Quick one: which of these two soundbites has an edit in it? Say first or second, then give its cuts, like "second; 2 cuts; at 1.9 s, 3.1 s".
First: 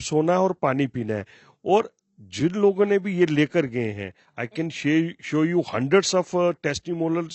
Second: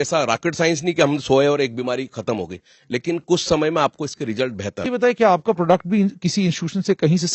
second; 1 cut; at 4.8 s